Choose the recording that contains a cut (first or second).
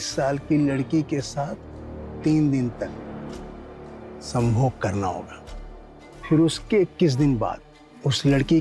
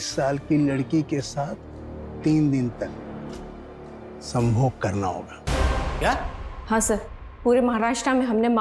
second